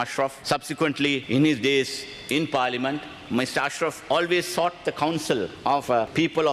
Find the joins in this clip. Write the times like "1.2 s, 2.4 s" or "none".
1.2 s, 3.2 s, 5.8 s